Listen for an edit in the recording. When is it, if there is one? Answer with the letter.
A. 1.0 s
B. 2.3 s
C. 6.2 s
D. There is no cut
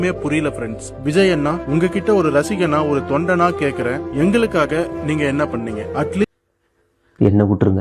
C